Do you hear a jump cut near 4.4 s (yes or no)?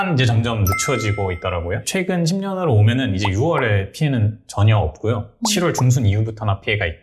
no